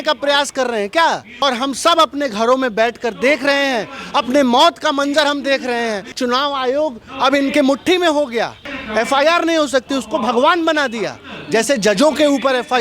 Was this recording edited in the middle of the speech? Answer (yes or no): yes